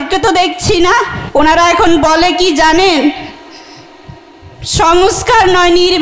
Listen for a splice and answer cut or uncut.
cut